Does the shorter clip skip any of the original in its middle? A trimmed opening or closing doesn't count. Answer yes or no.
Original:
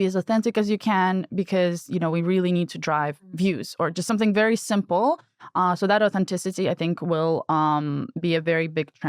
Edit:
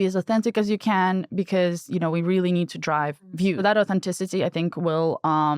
yes